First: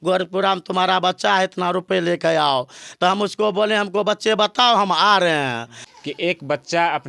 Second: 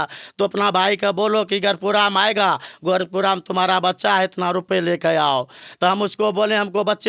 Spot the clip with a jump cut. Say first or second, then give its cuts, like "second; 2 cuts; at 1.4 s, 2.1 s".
first; 1 cut; at 5.8 s